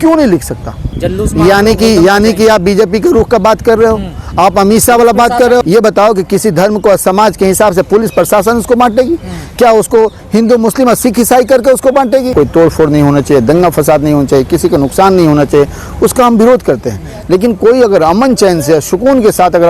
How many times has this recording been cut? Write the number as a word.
three